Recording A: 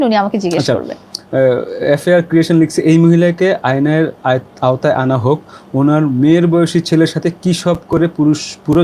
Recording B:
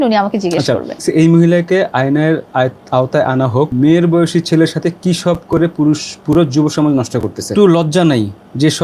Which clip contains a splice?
B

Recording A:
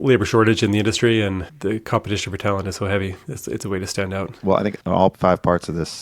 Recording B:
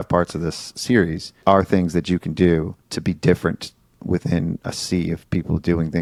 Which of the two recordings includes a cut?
A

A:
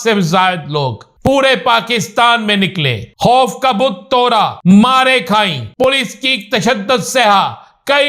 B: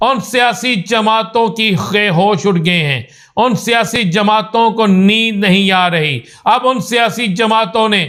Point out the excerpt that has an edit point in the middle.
A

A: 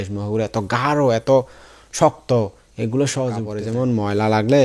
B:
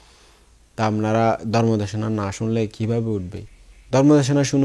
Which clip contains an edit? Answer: A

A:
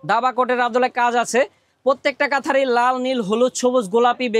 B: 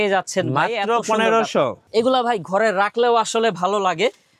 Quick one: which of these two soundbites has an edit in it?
B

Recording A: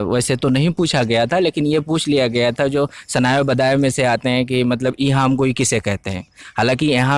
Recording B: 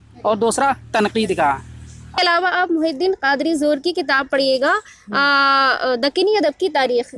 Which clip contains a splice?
B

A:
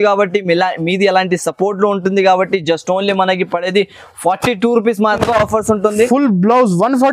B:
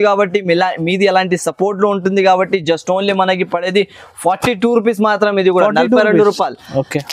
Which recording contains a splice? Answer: A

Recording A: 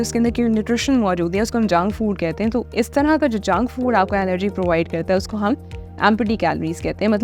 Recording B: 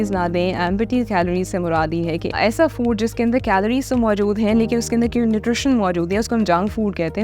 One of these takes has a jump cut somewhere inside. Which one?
B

